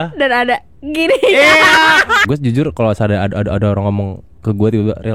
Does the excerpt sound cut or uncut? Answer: cut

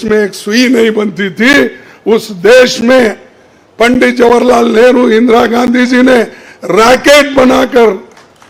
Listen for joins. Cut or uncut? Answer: uncut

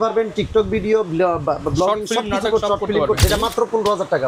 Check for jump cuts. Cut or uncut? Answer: cut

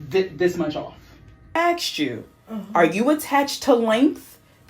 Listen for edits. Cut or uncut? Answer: cut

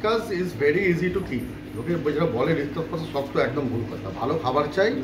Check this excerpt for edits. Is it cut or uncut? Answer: uncut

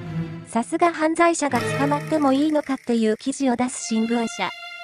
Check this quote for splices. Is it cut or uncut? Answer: uncut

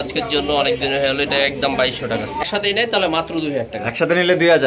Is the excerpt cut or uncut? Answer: cut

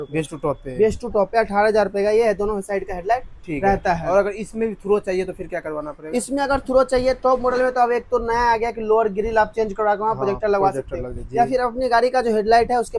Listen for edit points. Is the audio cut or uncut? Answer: uncut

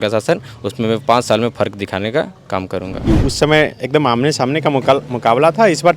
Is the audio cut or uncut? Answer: cut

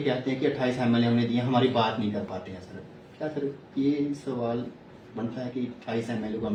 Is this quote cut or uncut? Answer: uncut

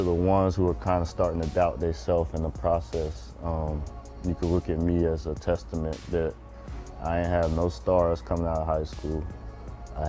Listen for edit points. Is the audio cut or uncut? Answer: uncut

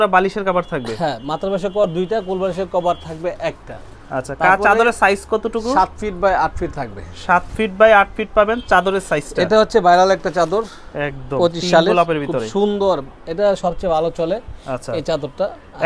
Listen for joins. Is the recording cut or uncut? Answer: uncut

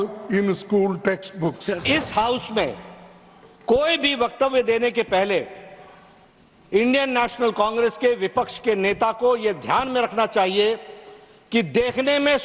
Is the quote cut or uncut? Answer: cut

